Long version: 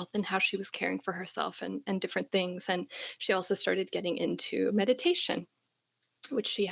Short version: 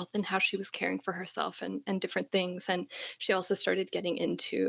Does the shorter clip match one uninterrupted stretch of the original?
yes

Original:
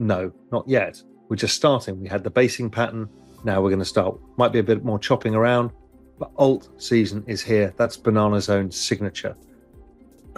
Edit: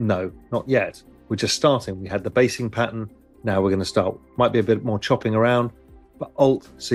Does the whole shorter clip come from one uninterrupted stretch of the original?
yes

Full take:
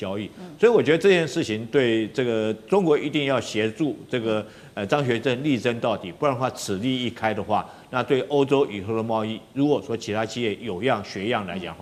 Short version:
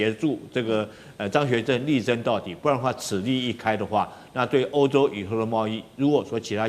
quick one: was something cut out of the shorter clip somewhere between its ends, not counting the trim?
no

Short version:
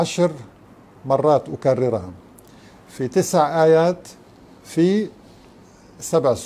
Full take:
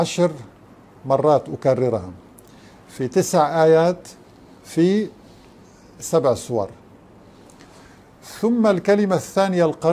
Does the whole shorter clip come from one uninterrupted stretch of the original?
yes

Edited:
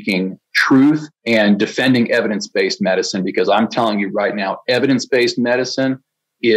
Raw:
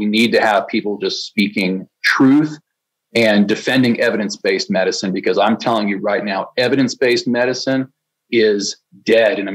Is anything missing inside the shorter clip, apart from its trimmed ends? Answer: yes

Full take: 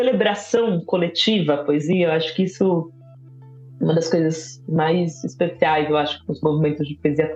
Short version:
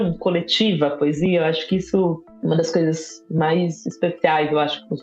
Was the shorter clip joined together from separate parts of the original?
yes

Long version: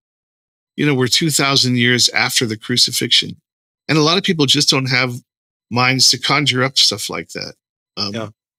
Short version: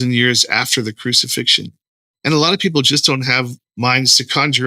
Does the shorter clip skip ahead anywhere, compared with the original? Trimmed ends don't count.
yes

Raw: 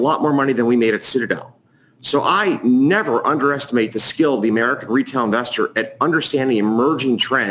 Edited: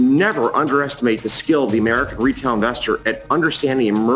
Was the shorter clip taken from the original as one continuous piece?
yes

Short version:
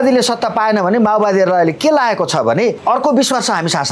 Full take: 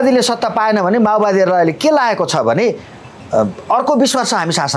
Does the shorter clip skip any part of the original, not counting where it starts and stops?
yes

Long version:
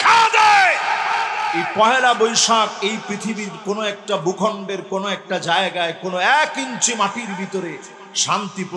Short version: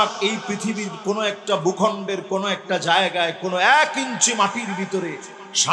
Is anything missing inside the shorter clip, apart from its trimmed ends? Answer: no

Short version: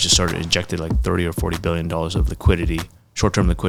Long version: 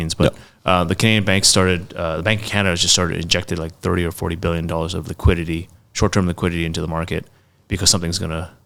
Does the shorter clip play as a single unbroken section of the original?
yes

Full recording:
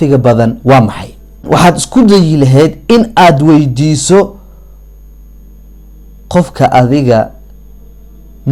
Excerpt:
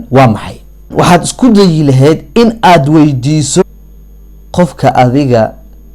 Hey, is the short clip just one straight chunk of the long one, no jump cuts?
no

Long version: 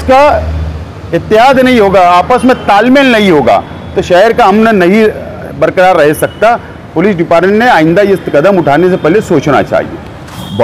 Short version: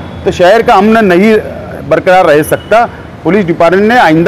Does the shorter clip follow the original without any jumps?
yes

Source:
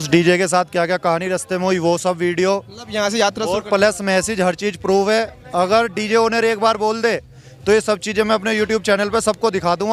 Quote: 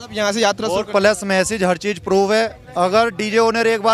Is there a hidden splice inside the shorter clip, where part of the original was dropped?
no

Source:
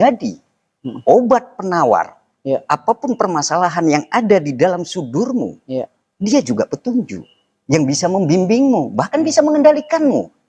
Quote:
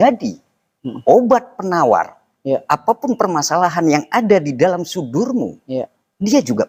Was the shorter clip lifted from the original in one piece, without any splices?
yes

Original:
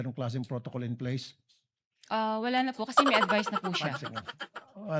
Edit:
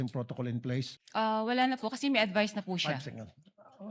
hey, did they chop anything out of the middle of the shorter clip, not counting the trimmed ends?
yes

